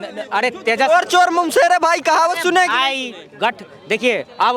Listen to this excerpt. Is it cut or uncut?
uncut